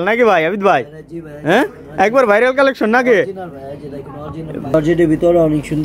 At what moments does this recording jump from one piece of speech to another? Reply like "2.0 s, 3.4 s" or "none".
4.7 s